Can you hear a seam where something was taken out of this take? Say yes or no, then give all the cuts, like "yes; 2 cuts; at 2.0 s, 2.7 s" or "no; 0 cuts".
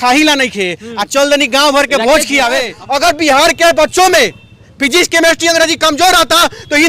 yes; 1 cut; at 2.8 s